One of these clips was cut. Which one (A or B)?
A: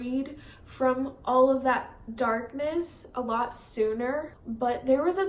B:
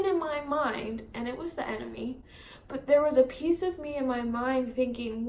A